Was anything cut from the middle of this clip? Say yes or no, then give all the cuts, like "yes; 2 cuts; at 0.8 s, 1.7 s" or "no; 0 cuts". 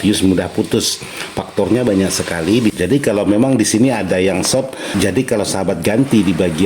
yes; 2 cuts; at 2.8 s, 4.8 s